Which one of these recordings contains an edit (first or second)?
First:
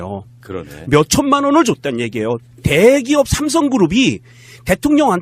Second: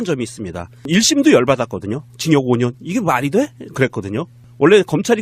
first